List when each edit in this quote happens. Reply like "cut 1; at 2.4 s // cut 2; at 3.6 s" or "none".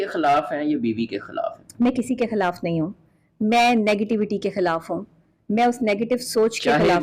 none